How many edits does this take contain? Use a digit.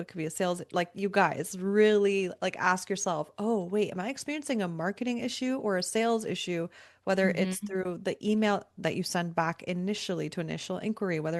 0